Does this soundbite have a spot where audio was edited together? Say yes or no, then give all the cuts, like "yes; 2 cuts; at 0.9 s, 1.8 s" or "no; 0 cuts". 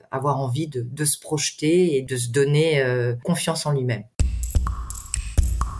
yes; 3 cuts; at 2.1 s, 3.2 s, 4.1 s